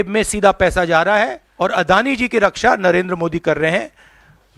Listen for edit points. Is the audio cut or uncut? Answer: cut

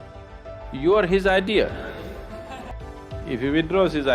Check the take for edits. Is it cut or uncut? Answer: cut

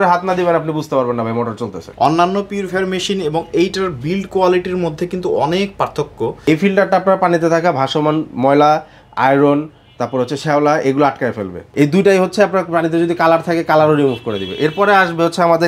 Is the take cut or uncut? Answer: cut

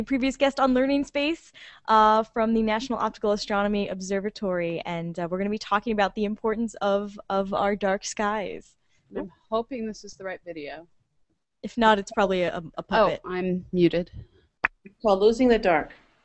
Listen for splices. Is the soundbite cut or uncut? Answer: uncut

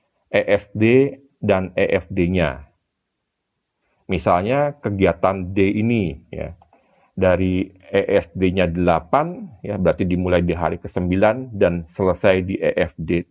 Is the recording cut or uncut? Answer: uncut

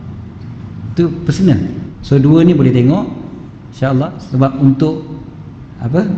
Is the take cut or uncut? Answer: cut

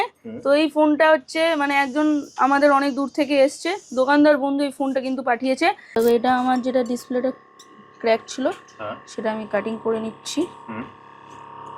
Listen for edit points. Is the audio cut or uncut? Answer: cut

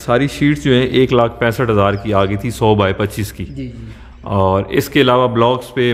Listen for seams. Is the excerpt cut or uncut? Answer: uncut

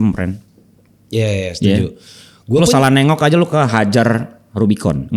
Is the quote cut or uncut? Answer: uncut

